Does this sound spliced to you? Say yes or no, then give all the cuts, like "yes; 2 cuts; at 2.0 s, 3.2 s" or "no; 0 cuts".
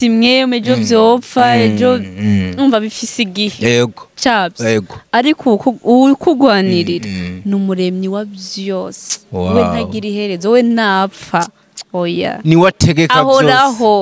no; 0 cuts